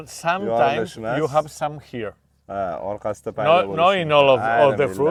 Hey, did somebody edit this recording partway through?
no; 0 cuts

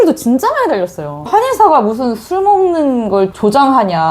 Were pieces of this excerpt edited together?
yes; 1 cut; at 1.2 s

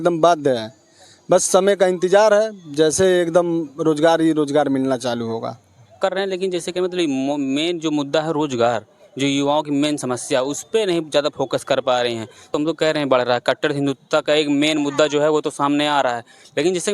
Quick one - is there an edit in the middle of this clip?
yes; 2 cuts; at 5.9 s, 12.5 s

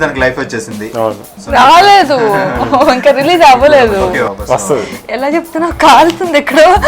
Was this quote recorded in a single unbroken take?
no; 1 cut; at 4.3 s

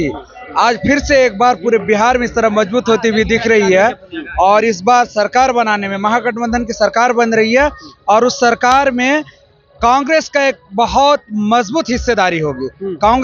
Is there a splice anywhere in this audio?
no; 0 cuts

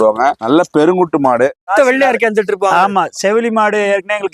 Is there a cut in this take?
yes; 1 cut; at 1.7 s

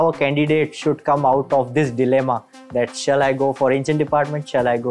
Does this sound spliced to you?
no; 0 cuts

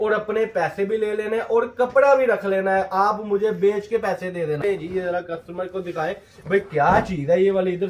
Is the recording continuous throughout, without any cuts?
no; 1 cut; at 4.6 s

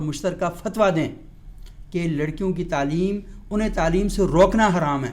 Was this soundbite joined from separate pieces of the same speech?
no; 0 cuts

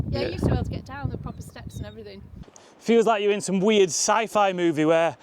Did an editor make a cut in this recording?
yes; 1 cut; at 2.4 s

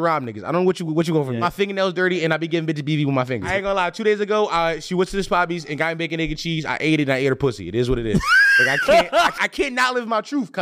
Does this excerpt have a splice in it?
yes; 3 cuts; at 1.4 s, 3.5 s, 9.4 s

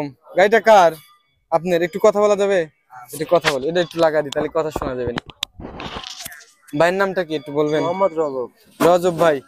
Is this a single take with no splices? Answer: yes; 0 cuts

